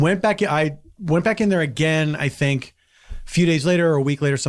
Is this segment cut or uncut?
uncut